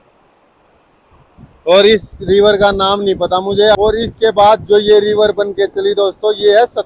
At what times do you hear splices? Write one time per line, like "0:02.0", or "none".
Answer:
0:03.7